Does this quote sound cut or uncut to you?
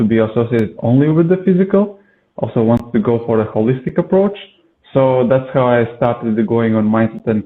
uncut